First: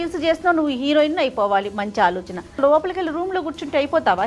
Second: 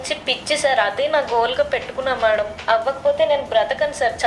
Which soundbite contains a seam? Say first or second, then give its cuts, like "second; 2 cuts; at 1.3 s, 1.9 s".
first; 1 cut; at 2.6 s